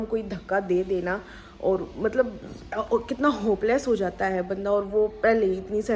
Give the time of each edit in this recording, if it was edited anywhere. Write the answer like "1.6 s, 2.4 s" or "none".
none